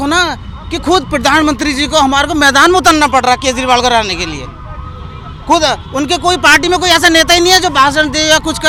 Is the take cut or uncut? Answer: uncut